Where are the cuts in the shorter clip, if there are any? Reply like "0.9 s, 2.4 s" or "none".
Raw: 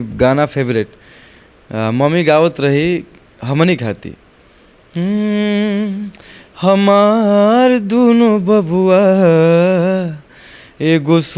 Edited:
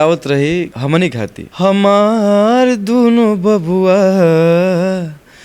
1.0 s